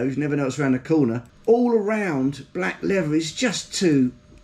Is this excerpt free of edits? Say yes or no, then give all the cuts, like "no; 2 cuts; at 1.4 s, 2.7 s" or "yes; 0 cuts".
no; 1 cut; at 1.3 s